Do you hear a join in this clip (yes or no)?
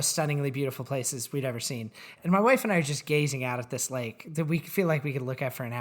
yes